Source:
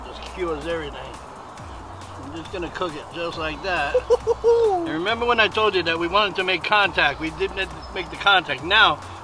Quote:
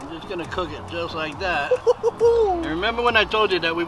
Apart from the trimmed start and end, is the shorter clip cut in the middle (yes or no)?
no